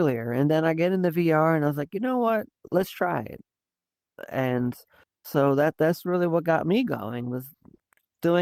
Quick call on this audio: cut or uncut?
uncut